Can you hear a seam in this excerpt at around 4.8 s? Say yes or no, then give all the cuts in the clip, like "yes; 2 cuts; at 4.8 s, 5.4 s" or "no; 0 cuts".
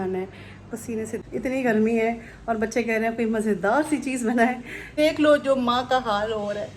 yes; 2 cuts; at 1.2 s, 4.8 s